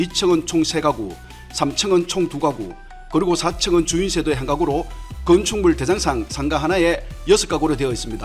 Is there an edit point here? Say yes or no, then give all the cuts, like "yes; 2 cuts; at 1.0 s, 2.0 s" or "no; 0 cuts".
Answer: no; 0 cuts